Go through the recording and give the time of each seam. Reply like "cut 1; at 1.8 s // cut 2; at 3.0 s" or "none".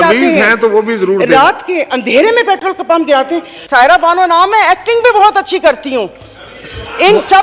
cut 1; at 3.6 s